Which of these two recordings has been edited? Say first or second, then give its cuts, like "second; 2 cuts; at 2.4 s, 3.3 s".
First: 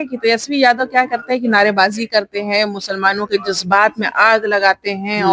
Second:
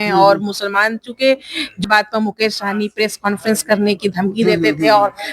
second; 1 cut; at 1.8 s